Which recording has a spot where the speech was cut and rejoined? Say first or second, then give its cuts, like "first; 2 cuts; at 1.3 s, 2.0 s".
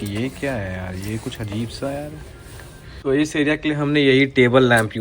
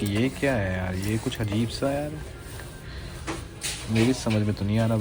first; 1 cut; at 2.9 s